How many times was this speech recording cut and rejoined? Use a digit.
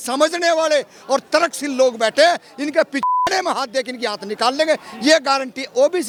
0